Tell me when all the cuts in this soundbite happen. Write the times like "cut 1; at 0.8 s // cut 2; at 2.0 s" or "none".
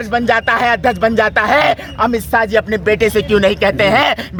none